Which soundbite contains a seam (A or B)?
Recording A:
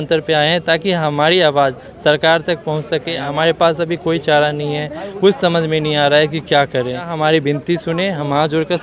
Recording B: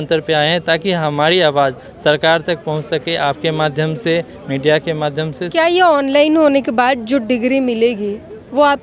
A